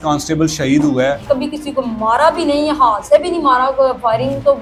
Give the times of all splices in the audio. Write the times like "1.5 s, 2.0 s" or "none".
1.2 s